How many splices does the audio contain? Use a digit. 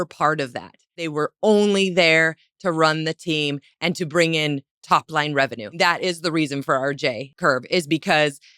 3